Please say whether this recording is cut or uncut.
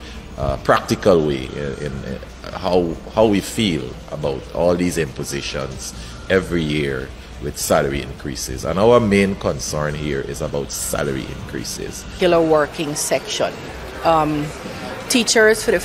cut